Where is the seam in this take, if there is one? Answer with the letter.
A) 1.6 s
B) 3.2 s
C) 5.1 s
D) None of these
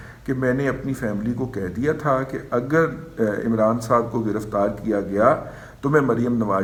D